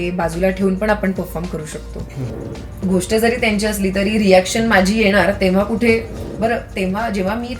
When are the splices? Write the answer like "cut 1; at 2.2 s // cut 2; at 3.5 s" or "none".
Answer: cut 1; at 2.4 s // cut 2; at 6.2 s